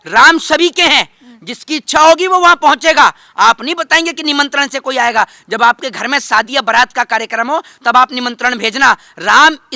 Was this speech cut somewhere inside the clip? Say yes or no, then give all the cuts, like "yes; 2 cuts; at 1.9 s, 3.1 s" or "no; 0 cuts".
no; 0 cuts